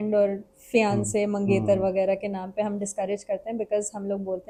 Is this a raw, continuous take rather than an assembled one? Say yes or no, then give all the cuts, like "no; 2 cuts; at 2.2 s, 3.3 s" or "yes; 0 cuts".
yes; 0 cuts